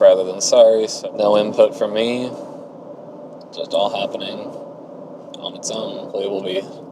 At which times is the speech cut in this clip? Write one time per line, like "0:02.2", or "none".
0:00.9
0:06.1